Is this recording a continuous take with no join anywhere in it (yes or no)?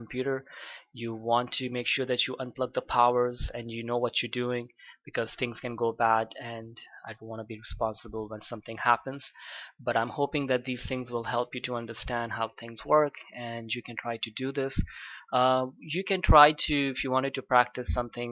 no